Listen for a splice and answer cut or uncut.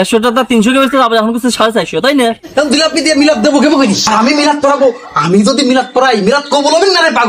cut